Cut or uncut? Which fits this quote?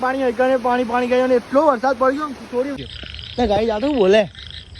cut